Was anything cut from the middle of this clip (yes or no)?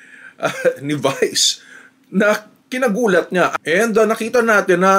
yes